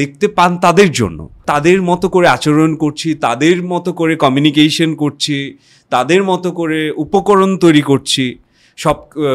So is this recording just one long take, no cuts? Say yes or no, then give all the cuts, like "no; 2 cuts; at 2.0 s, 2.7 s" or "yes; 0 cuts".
no; 1 cut; at 1.3 s